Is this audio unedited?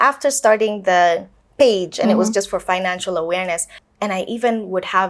no; 1 cut; at 3.8 s

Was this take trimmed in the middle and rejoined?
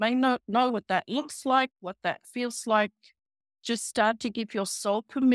no; 0 cuts

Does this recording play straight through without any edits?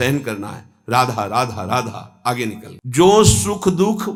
yes; 0 cuts

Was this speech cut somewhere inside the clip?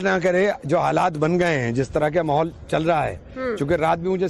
yes; 1 cut; at 2.1 s

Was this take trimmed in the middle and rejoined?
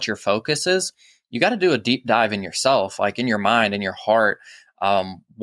no; 0 cuts

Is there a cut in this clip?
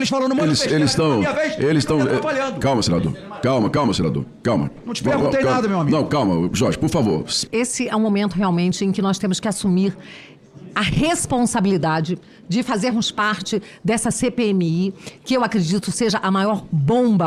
no; 0 cuts

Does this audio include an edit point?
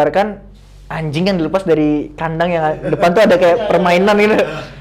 no; 0 cuts

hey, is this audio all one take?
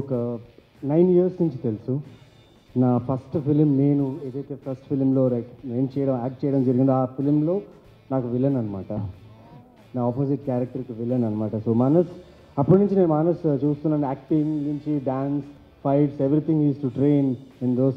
yes; 0 cuts

